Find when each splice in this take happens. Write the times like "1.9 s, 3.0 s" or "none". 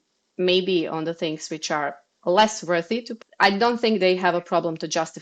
3.1 s

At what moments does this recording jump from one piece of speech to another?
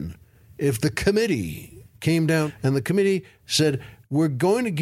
2.5 s

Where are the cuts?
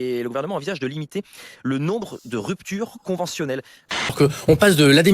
4.1 s

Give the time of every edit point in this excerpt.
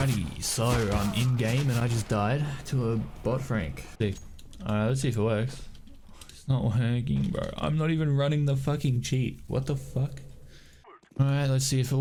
none

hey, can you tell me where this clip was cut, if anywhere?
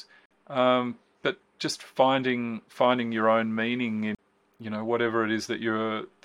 4.2 s

